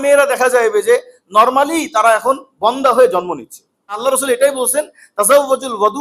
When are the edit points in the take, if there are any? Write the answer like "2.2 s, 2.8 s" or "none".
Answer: 4.0 s